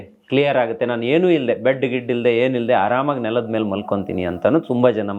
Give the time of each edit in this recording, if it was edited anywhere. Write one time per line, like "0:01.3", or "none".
none